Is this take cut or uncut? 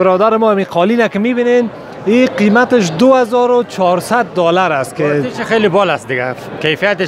uncut